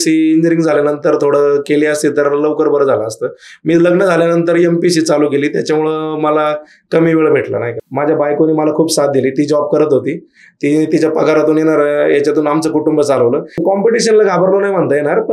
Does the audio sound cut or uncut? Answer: cut